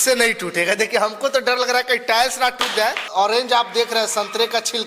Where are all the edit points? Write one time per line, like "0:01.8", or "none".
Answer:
0:03.1